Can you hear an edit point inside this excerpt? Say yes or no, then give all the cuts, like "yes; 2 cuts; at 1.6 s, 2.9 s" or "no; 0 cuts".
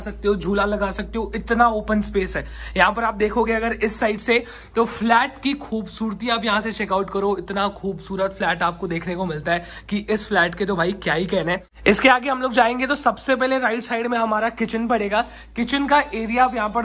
no; 0 cuts